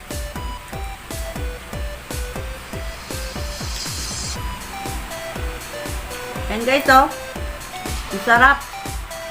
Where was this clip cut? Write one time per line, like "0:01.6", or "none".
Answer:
0:06.5